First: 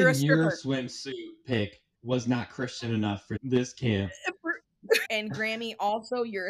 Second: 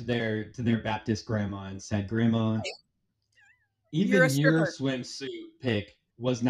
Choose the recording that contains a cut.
first; 2 cuts; at 3.3 s, 5.0 s

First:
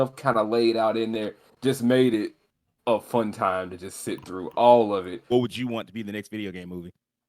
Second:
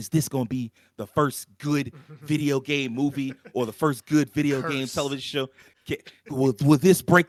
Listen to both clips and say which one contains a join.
first; 1 cut; at 5.3 s

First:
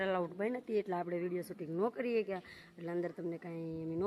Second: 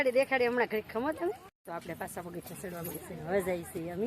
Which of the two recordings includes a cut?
second; 1 cut; at 1.6 s

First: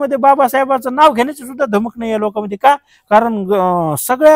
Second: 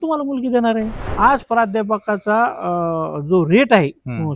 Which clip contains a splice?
second; 1 cut; at 1.0 s

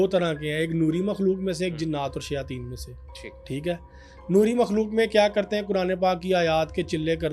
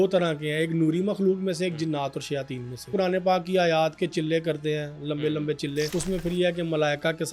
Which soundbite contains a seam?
second; 2 cuts; at 2.9 s, 5.9 s

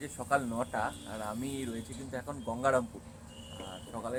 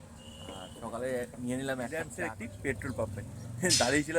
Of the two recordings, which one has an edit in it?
second; 1 cut; at 2.1 s

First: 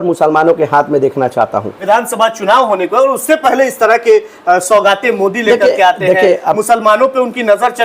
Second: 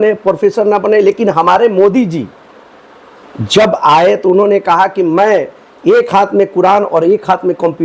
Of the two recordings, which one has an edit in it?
first; 1 cut; at 1.7 s

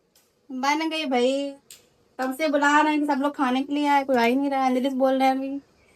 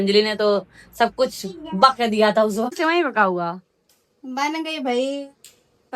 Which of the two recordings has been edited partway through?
second; 1 cut; at 2.8 s

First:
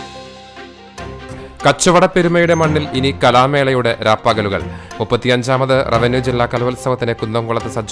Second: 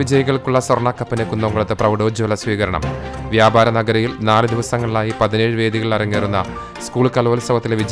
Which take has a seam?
first; 1 cut; at 1.5 s

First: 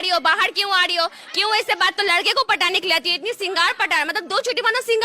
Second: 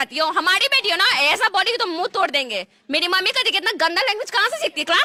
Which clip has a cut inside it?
first; 1 cut; at 2.0 s

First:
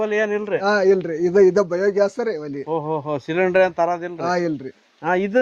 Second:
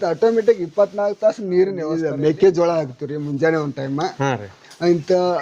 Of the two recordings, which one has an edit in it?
second; 1 cut; at 2.1 s

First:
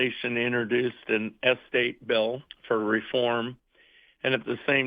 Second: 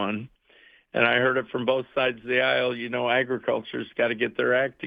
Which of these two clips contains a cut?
first; 1 cut; at 2.5 s

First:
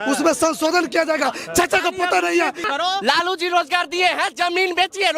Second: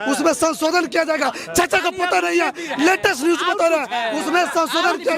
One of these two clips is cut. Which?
first; 1 cut; at 2.7 s

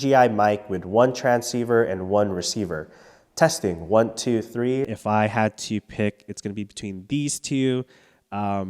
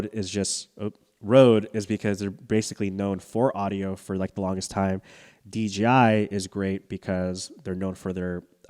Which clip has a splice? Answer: first; 1 cut; at 4.9 s

